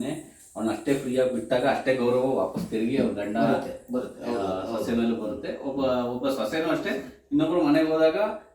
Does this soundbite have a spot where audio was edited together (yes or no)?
no